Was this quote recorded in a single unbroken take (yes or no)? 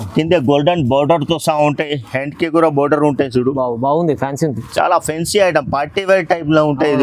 yes